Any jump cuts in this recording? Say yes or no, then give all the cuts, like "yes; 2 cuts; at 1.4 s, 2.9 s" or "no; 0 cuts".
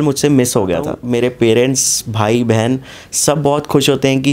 yes; 1 cut; at 1.0 s